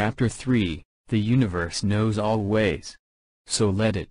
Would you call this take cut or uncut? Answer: uncut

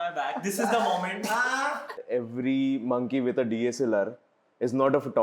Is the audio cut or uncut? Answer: cut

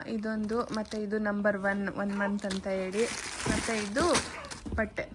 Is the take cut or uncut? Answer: uncut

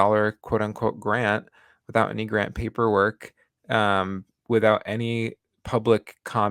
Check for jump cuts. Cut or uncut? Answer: uncut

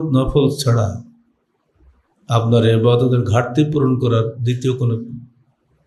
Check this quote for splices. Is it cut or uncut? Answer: uncut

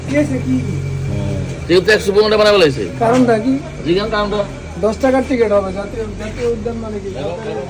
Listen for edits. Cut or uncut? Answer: uncut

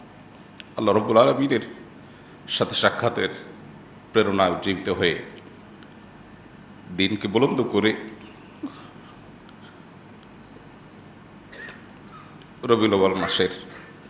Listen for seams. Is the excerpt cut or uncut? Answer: uncut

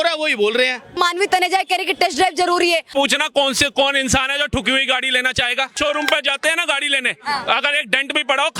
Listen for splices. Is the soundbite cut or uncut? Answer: cut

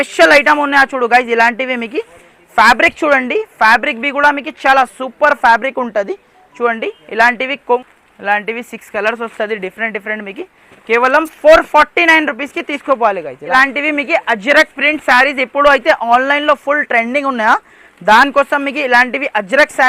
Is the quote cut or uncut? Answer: cut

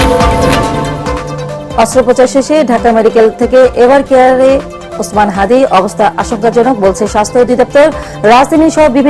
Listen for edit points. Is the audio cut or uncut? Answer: cut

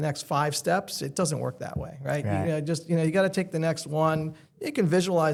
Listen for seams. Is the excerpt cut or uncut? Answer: uncut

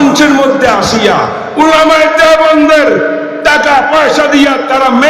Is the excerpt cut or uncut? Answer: uncut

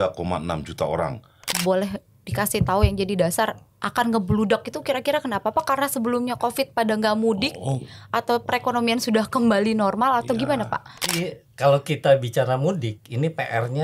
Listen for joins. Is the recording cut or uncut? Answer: cut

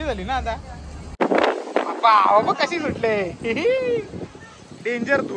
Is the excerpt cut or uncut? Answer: cut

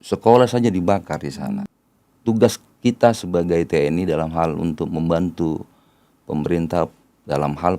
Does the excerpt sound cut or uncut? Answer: cut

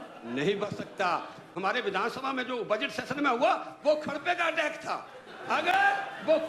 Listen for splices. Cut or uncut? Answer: cut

